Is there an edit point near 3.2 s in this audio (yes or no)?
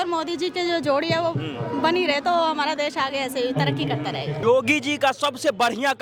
no